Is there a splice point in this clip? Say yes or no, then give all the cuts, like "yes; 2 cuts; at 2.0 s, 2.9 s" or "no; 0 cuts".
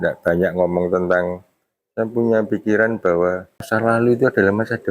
yes; 1 cut; at 3.6 s